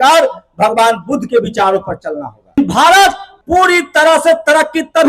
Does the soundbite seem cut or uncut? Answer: cut